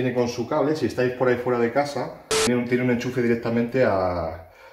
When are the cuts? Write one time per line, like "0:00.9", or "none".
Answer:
0:02.5